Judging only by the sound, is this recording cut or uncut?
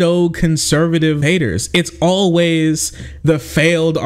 cut